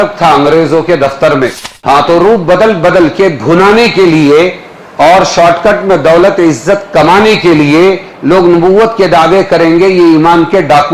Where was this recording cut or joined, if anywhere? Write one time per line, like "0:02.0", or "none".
0:01.7